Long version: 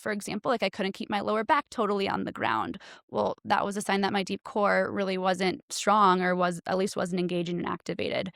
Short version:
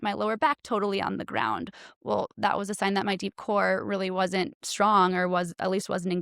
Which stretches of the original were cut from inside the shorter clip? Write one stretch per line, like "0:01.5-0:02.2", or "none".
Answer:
none